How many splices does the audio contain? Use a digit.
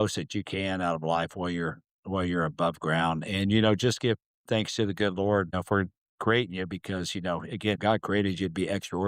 1